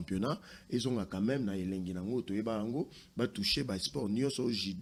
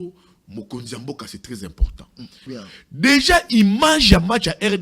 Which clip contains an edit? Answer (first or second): second